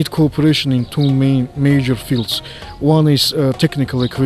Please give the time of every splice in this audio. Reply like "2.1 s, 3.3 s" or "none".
none